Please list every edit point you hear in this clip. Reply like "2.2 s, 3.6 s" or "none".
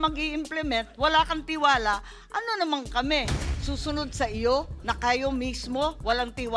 none